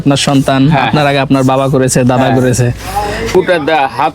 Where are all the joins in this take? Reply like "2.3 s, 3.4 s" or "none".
3.2 s